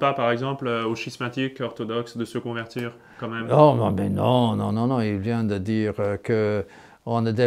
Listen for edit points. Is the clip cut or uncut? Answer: uncut